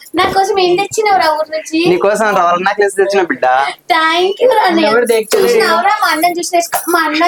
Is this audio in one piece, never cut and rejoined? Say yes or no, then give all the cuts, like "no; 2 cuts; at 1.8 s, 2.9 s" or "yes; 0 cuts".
yes; 0 cuts